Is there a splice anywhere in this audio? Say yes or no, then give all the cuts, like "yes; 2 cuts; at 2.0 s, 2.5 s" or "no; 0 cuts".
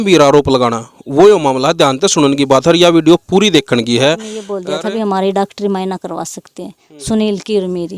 yes; 1 cut; at 4.5 s